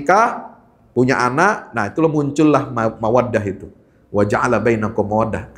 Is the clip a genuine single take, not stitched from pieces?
yes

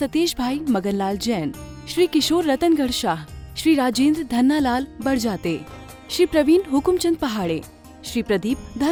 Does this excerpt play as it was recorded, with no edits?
yes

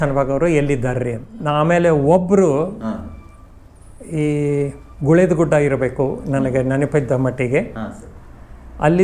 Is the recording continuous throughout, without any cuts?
no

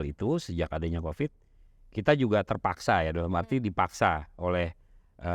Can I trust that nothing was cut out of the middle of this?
yes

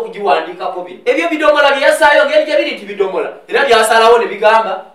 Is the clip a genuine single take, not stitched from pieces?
no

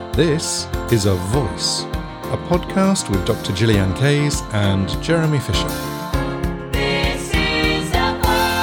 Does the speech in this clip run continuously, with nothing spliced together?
yes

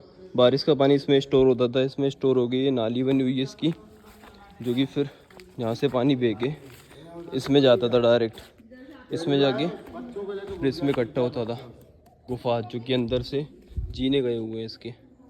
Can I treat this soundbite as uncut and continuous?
no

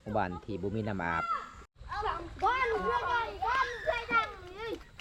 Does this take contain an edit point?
no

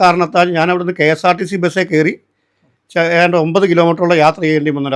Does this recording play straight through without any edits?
yes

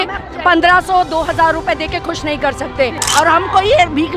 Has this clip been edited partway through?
yes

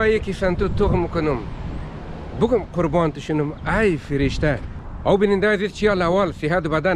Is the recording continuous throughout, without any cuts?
no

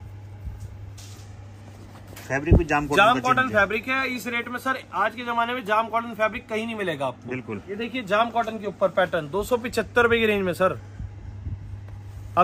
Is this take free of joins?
no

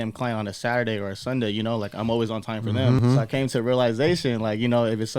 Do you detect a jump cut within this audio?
yes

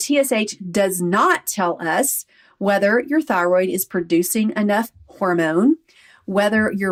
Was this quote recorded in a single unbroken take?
yes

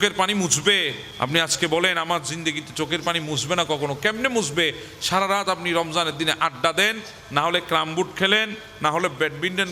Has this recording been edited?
yes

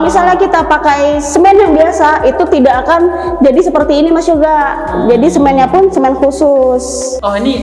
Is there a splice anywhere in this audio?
no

